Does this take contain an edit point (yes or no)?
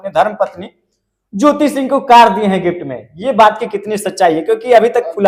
no